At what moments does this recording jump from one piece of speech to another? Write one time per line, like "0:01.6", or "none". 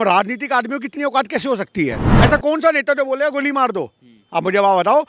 0:02.0